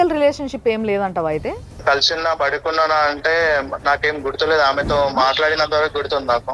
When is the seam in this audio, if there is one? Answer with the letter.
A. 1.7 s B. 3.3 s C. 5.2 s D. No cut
A